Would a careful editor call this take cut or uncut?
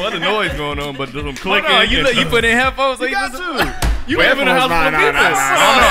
uncut